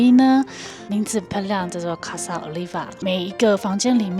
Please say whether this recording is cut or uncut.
cut